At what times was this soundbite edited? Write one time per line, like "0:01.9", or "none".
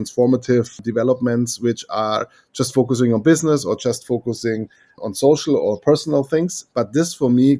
0:00.8
0:05.0

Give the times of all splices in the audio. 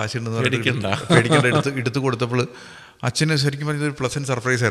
none

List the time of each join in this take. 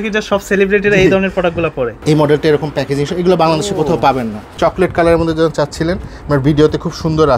0:02.0
0:04.4

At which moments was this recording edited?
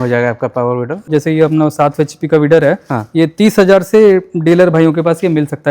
0:01.1

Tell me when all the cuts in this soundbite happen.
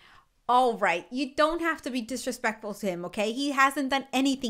none

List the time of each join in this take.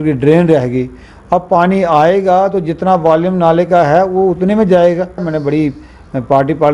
0:05.3

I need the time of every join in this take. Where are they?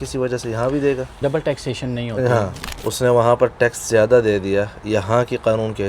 0:01.2
0:02.6

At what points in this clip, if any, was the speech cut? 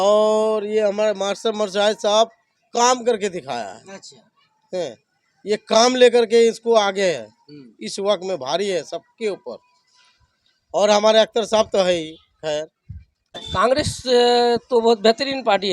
0:13.4

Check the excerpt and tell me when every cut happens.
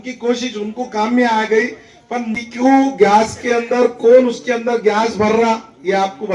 0:02.3

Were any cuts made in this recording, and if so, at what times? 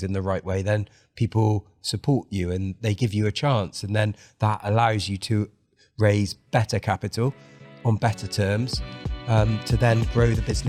none

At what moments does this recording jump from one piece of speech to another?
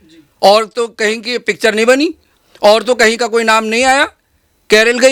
none

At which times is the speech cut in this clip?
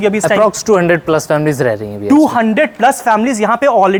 none

